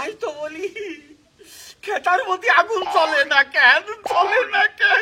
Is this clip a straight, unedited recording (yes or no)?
yes